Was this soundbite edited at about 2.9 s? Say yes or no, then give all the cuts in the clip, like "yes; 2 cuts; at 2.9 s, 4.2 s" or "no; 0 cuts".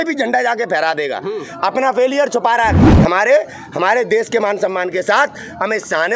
yes; 1 cut; at 2.9 s